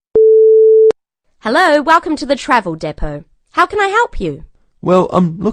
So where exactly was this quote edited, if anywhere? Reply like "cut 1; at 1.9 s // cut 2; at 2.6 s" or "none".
cut 1; at 0.9 s